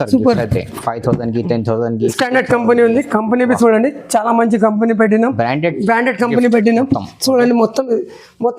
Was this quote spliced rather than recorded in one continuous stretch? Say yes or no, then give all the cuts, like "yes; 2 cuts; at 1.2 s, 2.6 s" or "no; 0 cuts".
no; 0 cuts